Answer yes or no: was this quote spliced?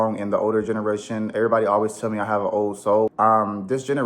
yes